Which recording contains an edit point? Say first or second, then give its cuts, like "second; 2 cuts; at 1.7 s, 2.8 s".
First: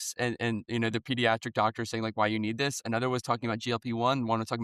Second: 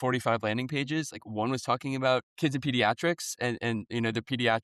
second; 1 cut; at 2.3 s